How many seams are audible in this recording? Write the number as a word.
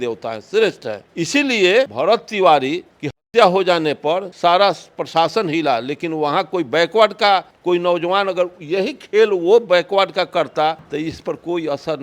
four